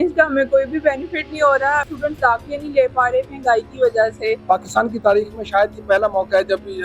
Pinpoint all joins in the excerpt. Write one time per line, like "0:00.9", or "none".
0:01.9
0:04.4